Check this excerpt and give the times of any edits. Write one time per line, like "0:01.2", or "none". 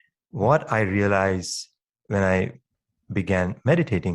0:03.0